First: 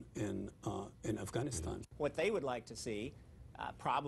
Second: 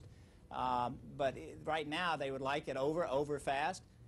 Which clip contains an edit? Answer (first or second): first